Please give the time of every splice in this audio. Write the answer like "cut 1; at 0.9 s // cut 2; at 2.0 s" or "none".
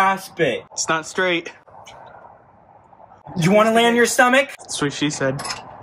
cut 1; at 3.2 s